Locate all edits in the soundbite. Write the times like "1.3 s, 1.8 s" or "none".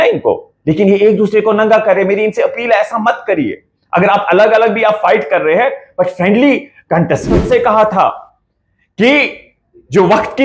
7.4 s